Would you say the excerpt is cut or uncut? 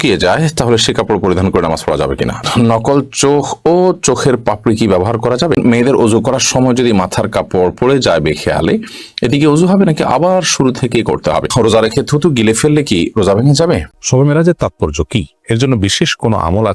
cut